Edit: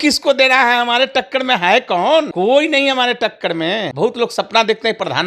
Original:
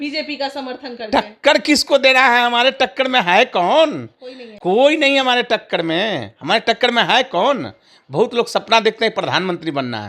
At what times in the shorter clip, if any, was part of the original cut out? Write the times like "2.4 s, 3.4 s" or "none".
2.3 s, 3.9 s